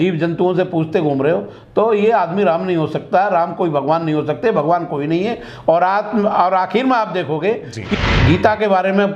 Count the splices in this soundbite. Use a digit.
1